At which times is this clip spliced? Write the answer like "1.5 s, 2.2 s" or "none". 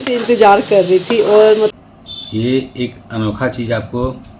1.7 s

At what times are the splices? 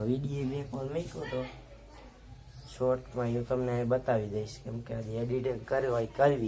4.3 s

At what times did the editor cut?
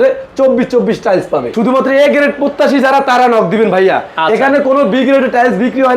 1.5 s

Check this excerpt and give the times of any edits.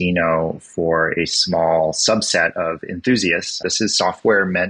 3.6 s

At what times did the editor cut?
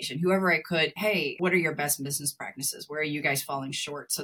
1.1 s

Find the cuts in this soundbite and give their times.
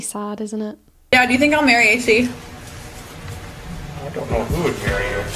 1.0 s

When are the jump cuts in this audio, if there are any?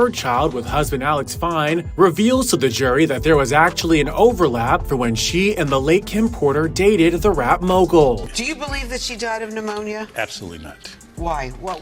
8.3 s

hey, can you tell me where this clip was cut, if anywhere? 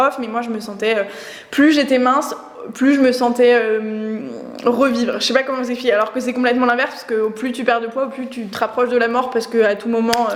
none

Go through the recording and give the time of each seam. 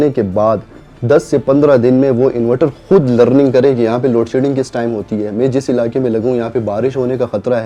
none

